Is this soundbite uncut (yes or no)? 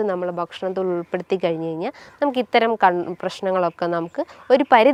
yes